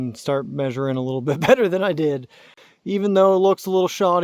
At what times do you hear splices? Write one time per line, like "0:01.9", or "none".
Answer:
0:02.6